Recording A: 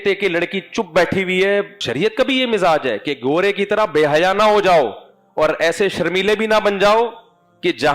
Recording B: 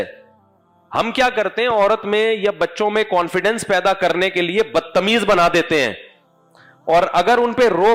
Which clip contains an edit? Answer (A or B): A